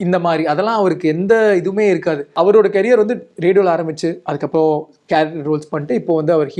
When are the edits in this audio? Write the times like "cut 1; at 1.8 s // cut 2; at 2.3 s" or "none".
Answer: cut 1; at 2.3 s